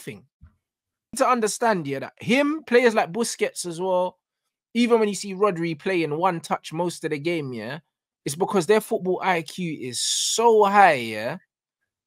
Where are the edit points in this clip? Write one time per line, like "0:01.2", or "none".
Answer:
0:01.1